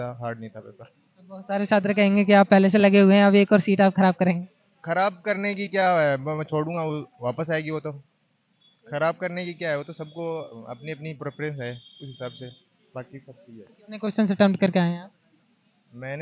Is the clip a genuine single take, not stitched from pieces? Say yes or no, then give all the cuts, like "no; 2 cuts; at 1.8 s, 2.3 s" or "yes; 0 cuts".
yes; 0 cuts